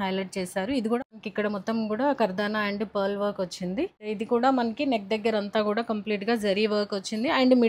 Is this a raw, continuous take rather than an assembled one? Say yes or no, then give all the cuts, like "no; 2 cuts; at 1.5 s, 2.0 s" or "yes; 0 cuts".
no; 2 cuts; at 1.0 s, 4.0 s